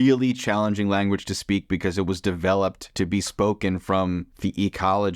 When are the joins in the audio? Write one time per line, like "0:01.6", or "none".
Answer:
0:02.8
0:04.3